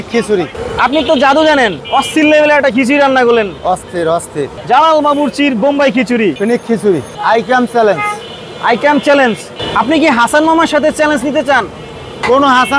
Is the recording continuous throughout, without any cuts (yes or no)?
yes